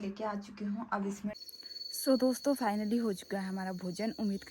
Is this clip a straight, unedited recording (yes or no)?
no